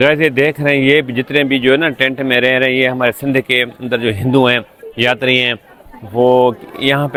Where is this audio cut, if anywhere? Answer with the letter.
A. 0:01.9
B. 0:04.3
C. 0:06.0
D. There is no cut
D